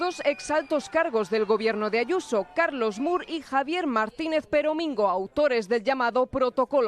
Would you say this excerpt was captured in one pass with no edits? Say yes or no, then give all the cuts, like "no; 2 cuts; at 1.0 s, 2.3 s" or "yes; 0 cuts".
yes; 0 cuts